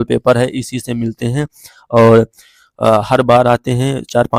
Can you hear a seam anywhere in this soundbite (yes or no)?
no